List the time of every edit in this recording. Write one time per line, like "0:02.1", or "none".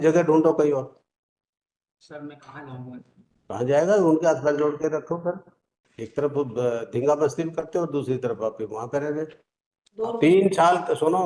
0:09.9